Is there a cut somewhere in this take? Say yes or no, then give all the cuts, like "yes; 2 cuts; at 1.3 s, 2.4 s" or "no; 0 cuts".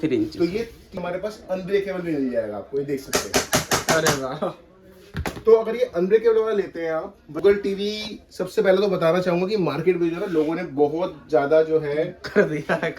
yes; 2 cuts; at 1.0 s, 7.4 s